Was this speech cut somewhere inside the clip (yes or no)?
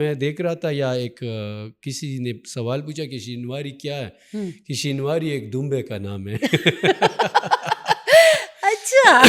no